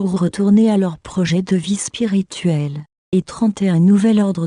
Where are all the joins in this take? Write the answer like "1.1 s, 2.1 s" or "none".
none